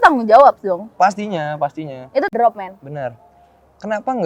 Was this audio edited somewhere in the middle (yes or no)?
yes